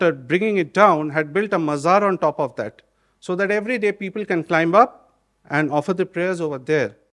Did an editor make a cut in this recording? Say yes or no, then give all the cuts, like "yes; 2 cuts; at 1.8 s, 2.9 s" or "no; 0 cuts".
no; 0 cuts